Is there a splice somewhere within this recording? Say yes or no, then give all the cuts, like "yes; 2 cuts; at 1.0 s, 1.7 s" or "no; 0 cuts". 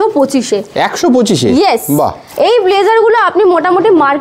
yes; 1 cut; at 2.2 s